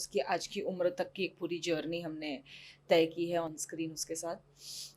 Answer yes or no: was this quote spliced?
no